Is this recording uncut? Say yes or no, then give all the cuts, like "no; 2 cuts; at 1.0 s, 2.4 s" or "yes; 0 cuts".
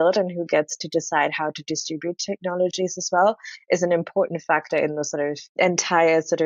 no; 1 cut; at 5.4 s